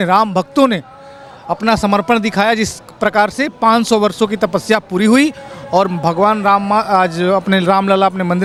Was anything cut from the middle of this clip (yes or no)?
no